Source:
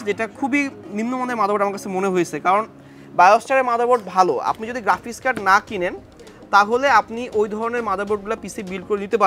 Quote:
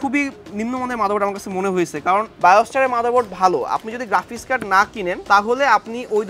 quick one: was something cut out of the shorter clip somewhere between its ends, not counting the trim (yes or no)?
yes